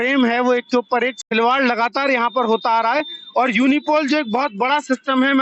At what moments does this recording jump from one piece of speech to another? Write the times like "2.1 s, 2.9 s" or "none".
1.2 s